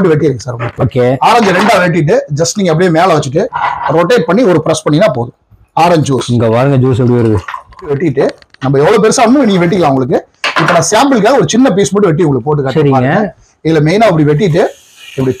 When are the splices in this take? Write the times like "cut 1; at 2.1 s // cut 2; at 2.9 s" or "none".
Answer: cut 1; at 7.9 s